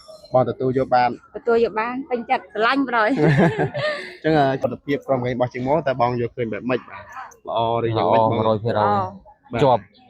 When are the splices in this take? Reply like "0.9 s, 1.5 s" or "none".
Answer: 4.6 s